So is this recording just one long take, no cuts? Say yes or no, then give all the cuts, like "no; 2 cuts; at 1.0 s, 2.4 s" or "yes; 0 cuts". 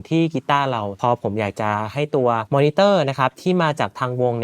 no; 1 cut; at 0.9 s